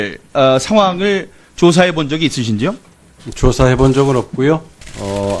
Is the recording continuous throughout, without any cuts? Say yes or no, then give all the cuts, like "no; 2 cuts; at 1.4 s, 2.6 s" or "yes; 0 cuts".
no; 1 cut; at 4.1 s